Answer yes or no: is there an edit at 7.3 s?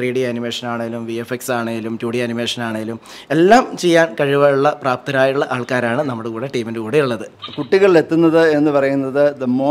yes